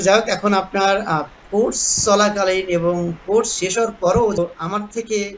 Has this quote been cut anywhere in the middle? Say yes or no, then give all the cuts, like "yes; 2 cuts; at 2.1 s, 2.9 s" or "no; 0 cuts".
yes; 1 cut; at 4.4 s